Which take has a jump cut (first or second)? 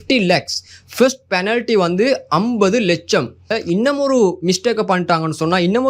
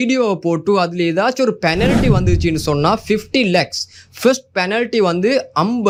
first